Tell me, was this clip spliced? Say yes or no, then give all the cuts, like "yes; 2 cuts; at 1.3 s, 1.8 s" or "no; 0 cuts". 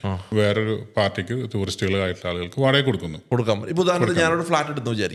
no; 0 cuts